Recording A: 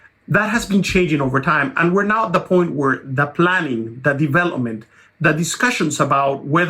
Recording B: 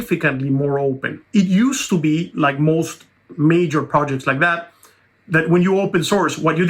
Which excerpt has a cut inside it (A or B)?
B